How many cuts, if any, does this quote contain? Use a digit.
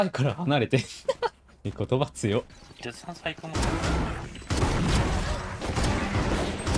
3